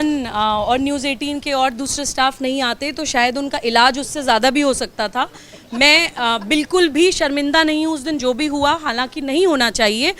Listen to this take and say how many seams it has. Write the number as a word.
zero